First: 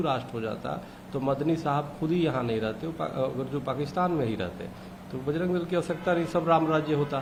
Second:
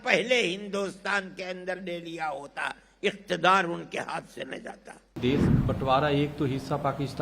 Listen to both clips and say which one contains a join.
second; 1 cut; at 5.2 s

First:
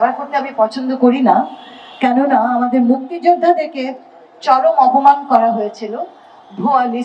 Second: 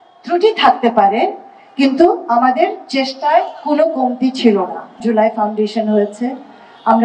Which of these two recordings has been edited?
second; 1 cut; at 5.0 s

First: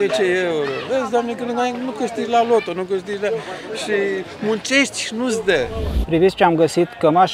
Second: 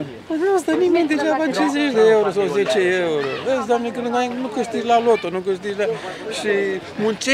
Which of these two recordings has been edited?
first; 1 cut; at 5.9 s

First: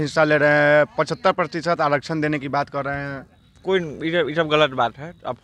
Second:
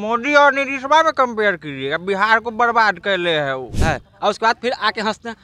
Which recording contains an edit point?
second; 1 cut; at 3.8 s

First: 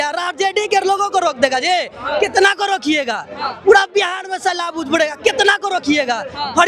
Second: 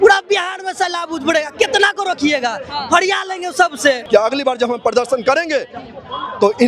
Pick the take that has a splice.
second; 1 cut; at 4.0 s

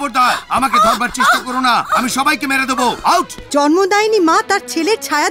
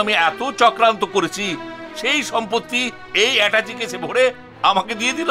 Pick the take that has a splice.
first; 1 cut; at 3.4 s

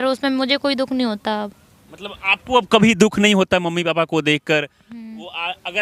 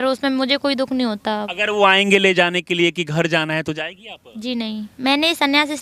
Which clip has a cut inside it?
second; 2 cuts; at 1.5 s, 4.9 s

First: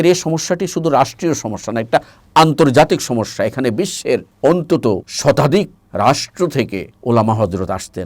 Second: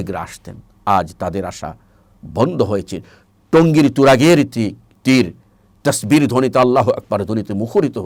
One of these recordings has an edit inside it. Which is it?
first; 4 cuts; at 4.3 s, 5.1 s, 5.8 s, 6.9 s

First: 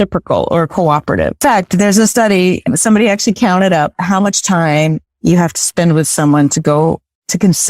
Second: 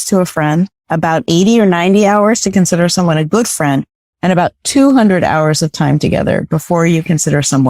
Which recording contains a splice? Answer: first; 1 cut; at 1.4 s

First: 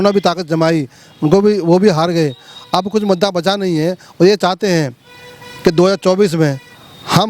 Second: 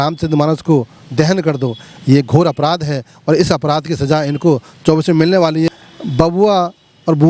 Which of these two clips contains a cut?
second; 1 cut; at 5.7 s

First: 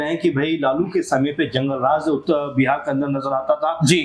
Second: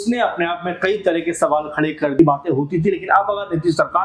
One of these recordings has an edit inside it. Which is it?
second; 1 cut; at 2.2 s

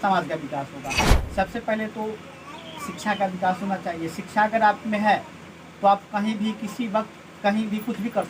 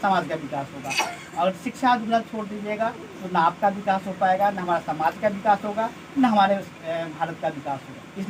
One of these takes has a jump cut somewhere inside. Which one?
first; 1 cut; at 1.2 s

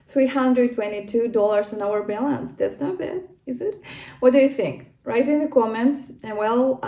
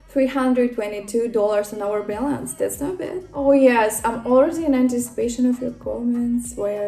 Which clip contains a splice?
second; 1 cut; at 3.3 s

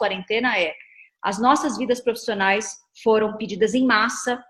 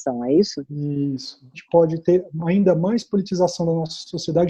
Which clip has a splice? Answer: second; 1 cut; at 1.5 s

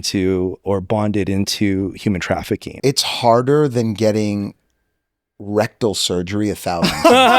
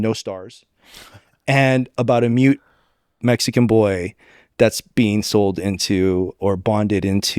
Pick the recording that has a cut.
first; 1 cut; at 2.7 s

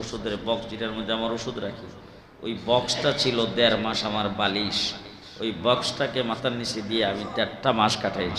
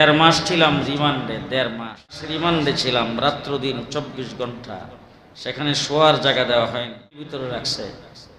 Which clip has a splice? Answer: second; 2 cuts; at 2.3 s, 7.4 s

